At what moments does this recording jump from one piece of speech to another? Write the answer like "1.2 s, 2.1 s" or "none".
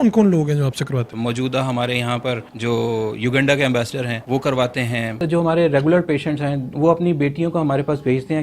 1.1 s, 2.5 s, 4.2 s, 5.2 s